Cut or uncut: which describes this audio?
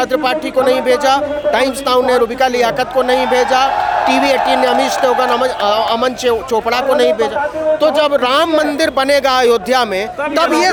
uncut